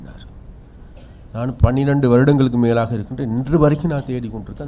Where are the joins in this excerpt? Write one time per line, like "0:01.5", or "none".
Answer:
none

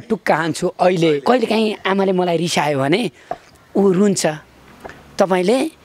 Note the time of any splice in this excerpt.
0:01.2

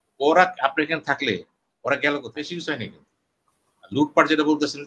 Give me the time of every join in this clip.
0:02.3

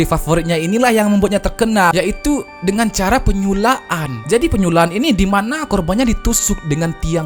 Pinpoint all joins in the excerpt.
none

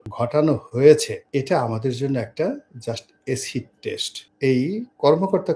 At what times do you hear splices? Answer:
0:04.3

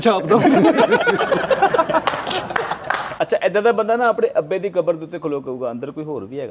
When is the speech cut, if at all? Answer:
0:03.0

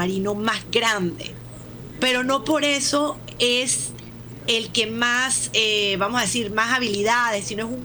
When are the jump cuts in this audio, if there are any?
none

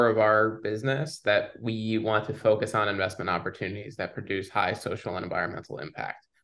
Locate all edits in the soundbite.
none

